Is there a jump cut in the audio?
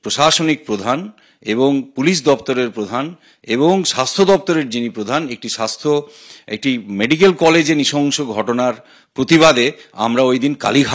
no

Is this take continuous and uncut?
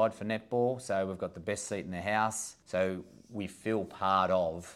no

